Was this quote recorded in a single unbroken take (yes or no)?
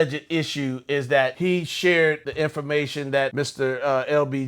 no